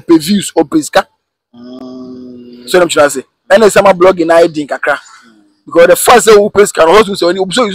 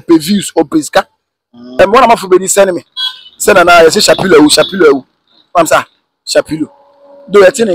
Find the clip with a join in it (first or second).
second